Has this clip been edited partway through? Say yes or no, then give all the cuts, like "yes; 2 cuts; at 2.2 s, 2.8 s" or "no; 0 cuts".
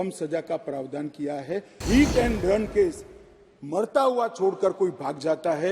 yes; 1 cut; at 1.8 s